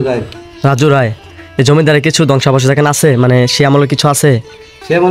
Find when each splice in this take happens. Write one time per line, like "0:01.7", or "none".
none